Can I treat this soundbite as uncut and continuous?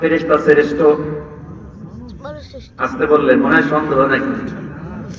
yes; 0 cuts

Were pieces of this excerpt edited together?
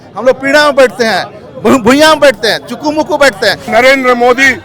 yes; 1 cut; at 3.6 s

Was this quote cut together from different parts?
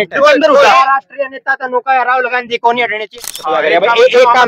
yes; 1 cut; at 3.1 s

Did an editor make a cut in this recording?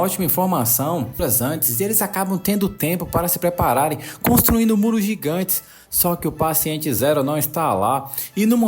yes; 1 cut; at 1.2 s

